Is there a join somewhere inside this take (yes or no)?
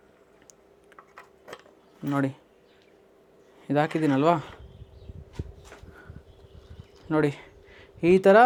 no